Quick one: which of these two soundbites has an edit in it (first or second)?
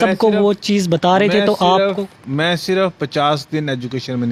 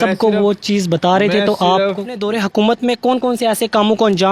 second